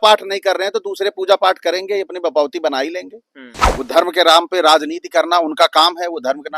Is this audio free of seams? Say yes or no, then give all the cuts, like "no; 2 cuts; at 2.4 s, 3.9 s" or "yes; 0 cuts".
no; 1 cut; at 3.6 s